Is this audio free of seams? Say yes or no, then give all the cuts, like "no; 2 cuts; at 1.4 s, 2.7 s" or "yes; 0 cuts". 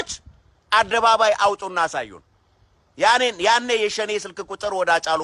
yes; 0 cuts